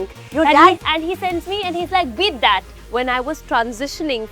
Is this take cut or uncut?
cut